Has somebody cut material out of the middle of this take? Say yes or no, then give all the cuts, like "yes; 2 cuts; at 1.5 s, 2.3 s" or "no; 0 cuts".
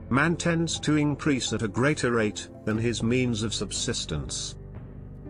no; 0 cuts